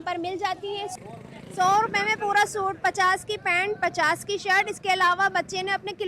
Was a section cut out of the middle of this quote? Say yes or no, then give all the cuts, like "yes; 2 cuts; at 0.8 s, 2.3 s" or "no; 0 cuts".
yes; 1 cut; at 1.0 s